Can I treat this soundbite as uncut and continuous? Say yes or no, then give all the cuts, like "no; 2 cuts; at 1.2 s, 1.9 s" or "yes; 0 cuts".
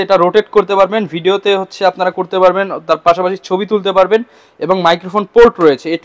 yes; 0 cuts